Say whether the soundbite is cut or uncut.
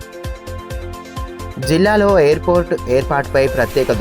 cut